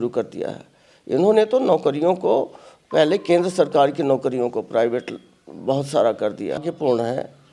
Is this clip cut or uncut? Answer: cut